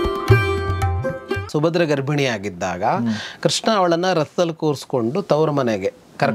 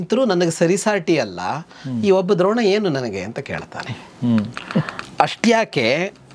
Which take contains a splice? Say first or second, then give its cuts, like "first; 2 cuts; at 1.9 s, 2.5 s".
first; 1 cut; at 1.5 s